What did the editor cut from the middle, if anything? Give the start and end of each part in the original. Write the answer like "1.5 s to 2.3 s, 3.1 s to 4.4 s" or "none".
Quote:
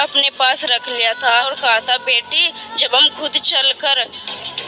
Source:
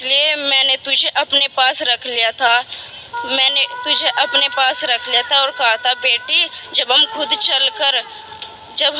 2.6 s to 5.4 s